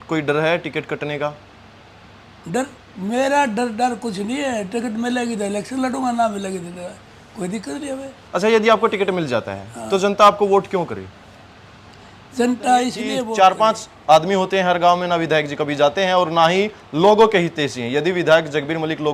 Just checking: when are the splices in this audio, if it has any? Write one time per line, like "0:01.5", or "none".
0:13.2